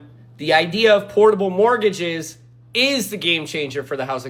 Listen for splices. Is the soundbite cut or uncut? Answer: uncut